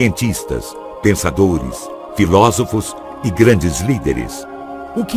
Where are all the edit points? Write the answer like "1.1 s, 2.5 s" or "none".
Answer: 2.3 s

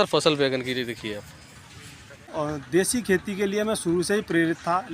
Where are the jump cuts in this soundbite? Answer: 2.3 s

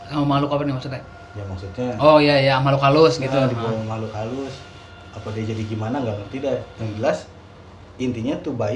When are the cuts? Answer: none

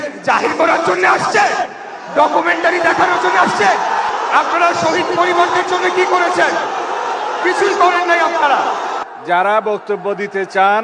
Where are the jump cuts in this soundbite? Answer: 4.1 s, 9.0 s

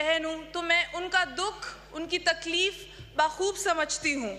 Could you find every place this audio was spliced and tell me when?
none

